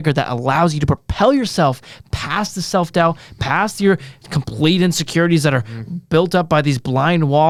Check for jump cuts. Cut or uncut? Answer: uncut